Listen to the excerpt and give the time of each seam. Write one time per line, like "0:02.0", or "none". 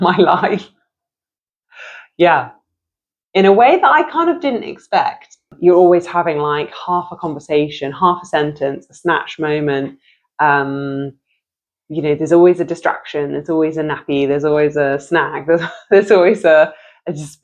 0:05.5